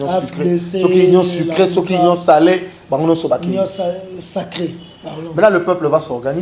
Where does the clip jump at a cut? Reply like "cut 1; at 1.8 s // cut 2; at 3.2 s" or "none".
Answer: none